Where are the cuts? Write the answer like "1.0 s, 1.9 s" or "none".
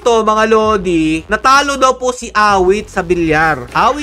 1.3 s